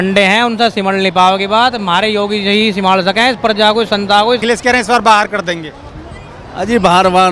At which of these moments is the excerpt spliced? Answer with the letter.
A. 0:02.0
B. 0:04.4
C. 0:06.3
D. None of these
B